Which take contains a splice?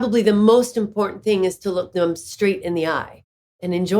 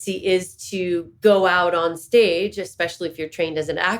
first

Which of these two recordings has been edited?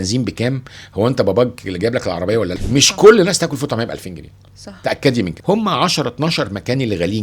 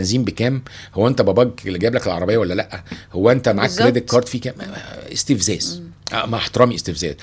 first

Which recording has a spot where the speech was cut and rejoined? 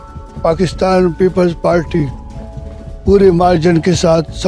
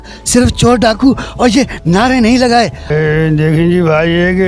second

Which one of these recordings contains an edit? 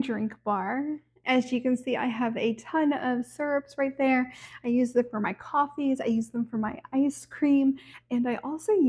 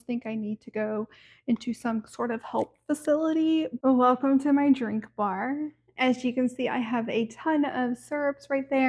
second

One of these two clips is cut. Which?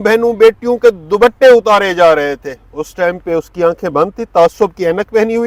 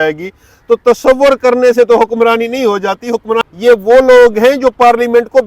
second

